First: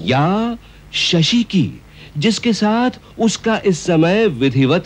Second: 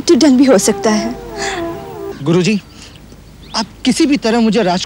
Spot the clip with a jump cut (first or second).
second